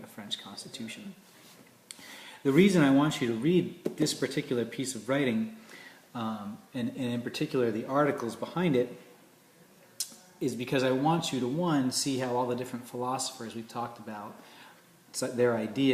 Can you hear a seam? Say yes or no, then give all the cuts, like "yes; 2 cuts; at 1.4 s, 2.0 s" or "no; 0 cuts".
no; 0 cuts